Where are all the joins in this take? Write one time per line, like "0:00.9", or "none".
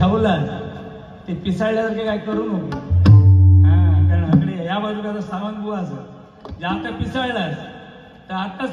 none

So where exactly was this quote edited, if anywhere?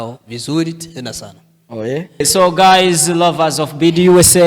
0:02.2

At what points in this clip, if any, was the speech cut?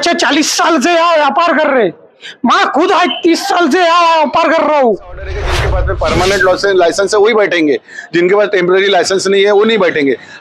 0:05.7

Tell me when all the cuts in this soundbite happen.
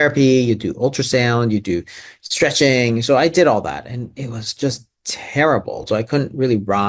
0:05.8

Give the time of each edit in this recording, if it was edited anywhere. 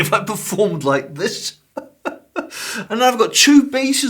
0:02.8

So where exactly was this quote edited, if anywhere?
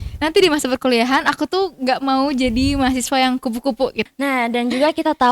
0:04.0

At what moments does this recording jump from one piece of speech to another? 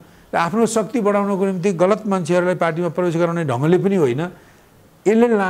none

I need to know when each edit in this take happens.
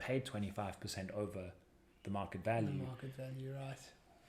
none

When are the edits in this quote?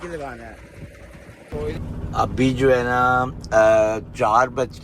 0:01.7

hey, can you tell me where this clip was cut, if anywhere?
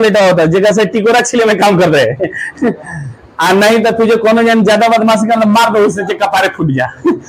none

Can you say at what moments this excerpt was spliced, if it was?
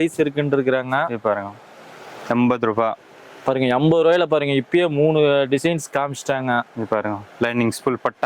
none

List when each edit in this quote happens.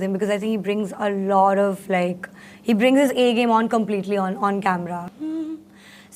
0:05.1

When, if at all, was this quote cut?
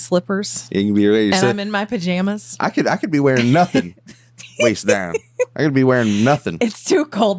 none

